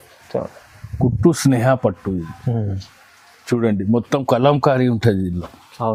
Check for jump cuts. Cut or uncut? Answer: uncut